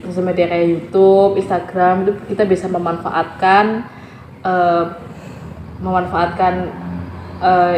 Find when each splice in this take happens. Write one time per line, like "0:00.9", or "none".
none